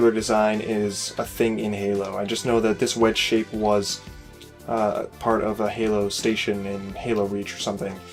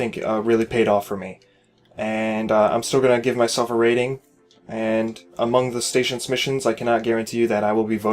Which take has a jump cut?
second; 1 cut; at 2.1 s

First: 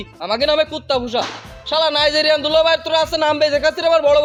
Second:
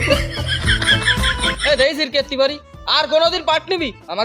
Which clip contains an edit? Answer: second; 1 cut; at 1.4 s

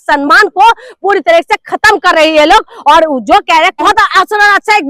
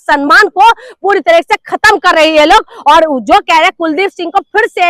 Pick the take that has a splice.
first; 1 cut; at 3.8 s

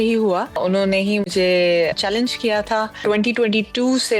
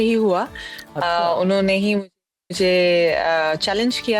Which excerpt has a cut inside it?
first; 3 cuts; at 0.9 s, 2.0 s, 3.0 s

